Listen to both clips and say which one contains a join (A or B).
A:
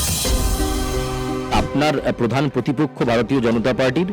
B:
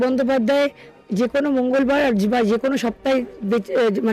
A